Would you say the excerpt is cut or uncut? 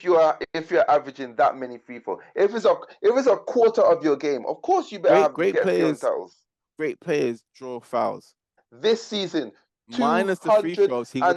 cut